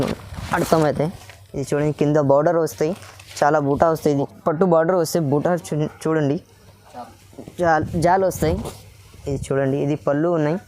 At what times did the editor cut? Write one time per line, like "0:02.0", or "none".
0:04.3